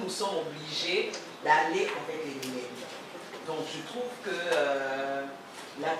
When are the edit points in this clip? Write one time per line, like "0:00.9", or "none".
none

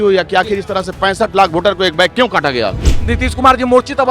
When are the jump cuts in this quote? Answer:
0:03.1

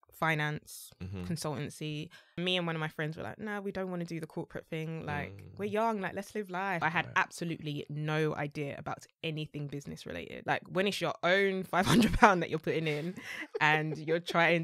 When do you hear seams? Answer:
0:02.4
0:06.8
0:10.3

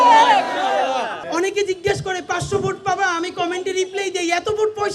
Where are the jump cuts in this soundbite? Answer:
0:01.2

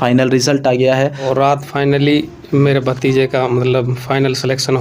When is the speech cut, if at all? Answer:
0:01.3

